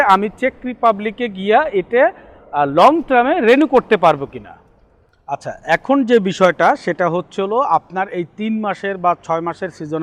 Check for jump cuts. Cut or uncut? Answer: uncut